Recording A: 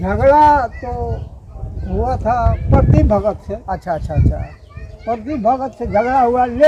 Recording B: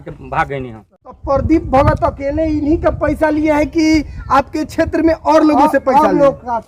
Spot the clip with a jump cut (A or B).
B